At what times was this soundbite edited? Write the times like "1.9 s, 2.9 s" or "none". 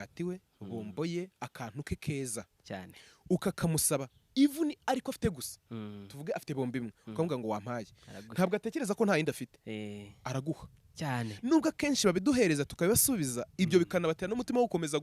none